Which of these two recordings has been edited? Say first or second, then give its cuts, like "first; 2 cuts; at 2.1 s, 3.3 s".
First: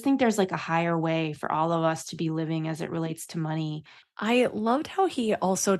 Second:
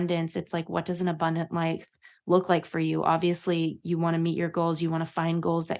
first; 1 cut; at 3.8 s